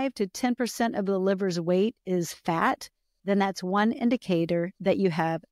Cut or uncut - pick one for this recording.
uncut